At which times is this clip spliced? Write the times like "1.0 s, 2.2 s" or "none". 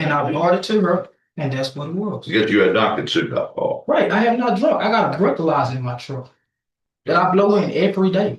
none